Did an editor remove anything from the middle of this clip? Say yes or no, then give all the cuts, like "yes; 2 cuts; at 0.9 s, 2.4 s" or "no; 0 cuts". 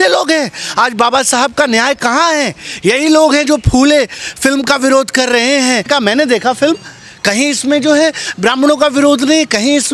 yes; 1 cut; at 5.9 s